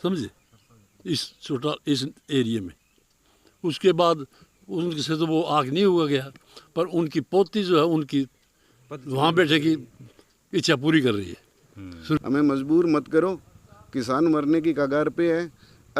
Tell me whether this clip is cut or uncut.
cut